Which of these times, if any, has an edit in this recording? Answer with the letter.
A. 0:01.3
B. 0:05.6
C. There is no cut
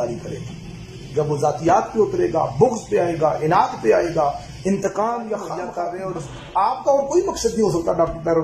B